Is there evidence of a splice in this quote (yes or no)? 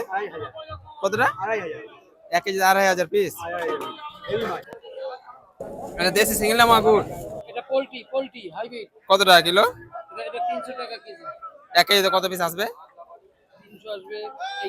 yes